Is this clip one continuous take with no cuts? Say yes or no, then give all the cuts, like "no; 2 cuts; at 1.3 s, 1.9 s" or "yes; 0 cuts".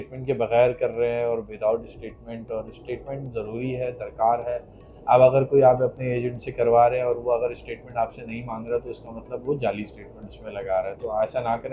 yes; 0 cuts